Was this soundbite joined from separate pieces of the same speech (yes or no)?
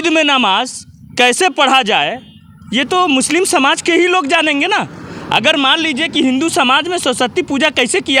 no